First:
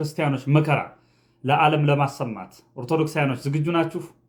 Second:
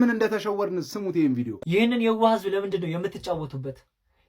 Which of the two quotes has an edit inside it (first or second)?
second